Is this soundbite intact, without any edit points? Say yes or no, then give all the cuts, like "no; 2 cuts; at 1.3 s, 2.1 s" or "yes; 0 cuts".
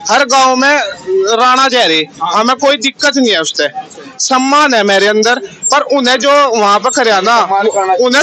yes; 0 cuts